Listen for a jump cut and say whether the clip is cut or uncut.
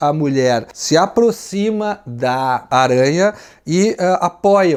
uncut